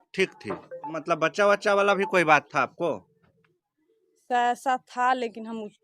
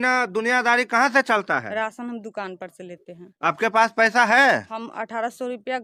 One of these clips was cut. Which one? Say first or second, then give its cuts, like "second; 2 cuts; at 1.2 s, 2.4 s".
first; 1 cut; at 1.0 s